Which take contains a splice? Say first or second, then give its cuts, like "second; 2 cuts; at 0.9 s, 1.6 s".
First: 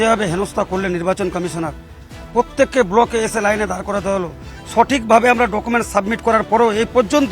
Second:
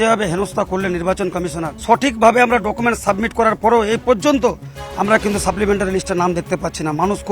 second; 1 cut; at 1.7 s